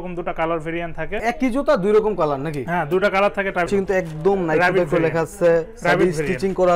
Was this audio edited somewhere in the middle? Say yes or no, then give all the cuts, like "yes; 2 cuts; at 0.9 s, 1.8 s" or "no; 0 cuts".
yes; 2 cuts; at 1.2 s, 3.7 s